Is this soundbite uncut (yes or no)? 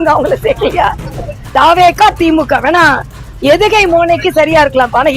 yes